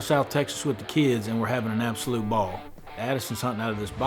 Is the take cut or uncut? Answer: cut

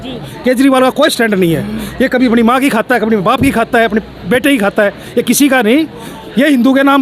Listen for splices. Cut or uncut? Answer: uncut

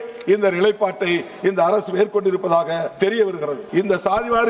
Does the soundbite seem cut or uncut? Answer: cut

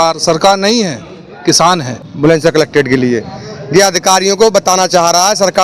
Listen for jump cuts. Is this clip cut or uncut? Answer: cut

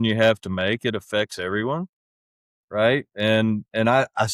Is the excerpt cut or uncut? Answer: uncut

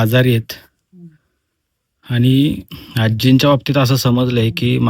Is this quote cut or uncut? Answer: uncut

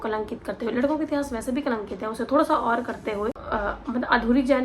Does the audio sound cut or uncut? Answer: cut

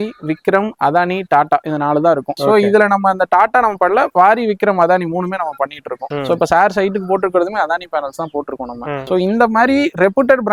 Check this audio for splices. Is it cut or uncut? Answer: uncut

